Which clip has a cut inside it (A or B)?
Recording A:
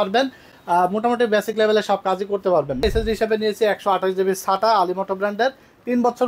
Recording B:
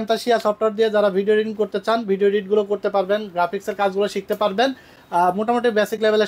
A